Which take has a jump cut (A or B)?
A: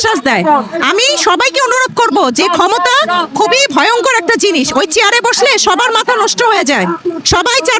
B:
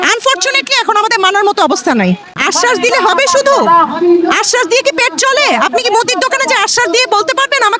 B